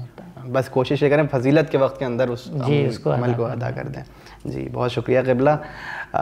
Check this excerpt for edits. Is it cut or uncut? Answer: uncut